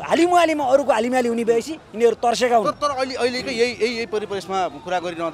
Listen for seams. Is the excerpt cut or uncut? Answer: uncut